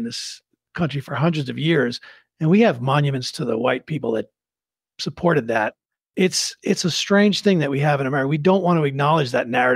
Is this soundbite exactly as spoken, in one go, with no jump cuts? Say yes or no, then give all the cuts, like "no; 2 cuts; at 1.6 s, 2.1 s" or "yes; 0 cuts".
no; 1 cut; at 6.0 s